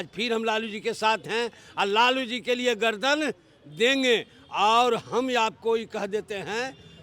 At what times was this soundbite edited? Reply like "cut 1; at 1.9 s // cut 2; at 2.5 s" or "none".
none